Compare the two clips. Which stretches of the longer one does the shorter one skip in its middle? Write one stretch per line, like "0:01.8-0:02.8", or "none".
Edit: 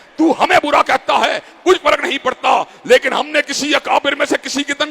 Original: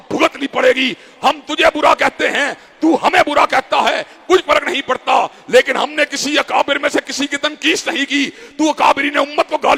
none

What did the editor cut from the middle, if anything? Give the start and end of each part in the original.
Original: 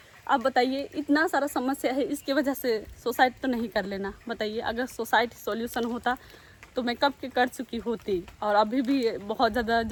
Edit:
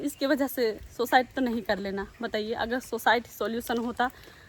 none

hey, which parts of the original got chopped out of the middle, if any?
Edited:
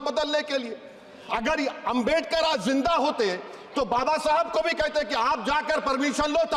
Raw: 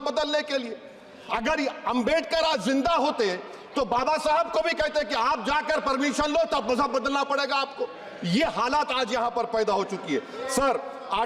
none

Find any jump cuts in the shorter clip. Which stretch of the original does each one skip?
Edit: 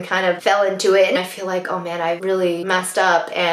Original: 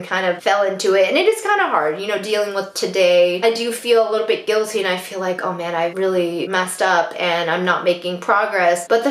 0:01.2-0:04.9
0:06.4-0:06.5

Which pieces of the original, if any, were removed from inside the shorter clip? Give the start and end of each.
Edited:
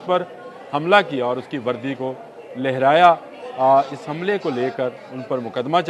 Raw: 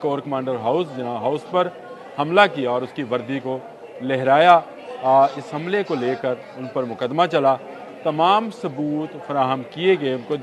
none

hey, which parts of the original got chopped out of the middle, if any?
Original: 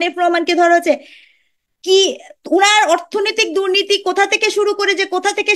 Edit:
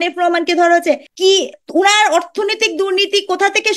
0:01.5-0:02.3

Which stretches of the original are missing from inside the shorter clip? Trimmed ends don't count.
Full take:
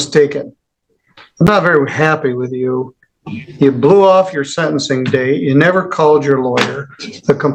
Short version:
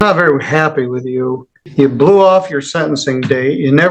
0:03.0-0:03.4

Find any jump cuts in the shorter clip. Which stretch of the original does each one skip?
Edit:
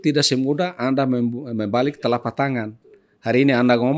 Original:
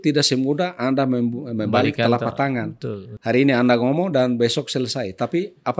none

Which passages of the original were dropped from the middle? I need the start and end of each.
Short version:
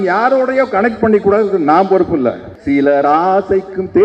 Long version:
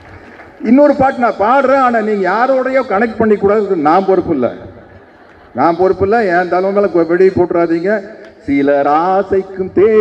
0:04.7-0:08.3

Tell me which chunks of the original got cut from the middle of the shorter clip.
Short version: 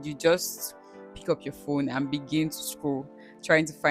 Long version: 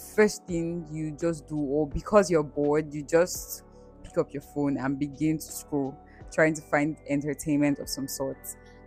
none

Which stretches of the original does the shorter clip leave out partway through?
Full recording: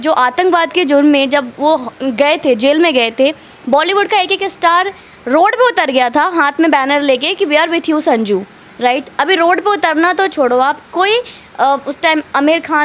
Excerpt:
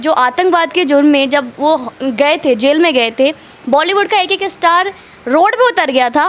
none

